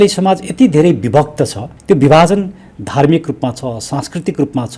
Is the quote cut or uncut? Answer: cut